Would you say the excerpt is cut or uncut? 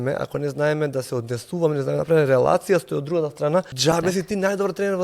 cut